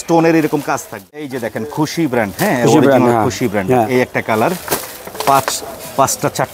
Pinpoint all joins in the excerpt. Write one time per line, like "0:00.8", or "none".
0:01.2